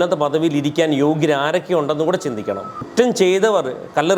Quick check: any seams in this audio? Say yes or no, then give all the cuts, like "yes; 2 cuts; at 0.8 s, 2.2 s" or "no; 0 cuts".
yes; 1 cut; at 2.8 s